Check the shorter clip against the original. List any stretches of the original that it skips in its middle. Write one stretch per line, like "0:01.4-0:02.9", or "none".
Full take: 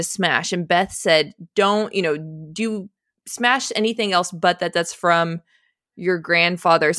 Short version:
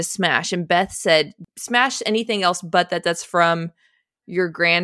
0:01.4-0:03.1